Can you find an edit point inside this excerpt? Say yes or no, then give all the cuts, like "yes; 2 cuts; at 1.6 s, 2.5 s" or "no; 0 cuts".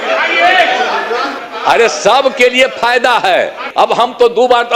yes; 2 cuts; at 1.3 s, 3.7 s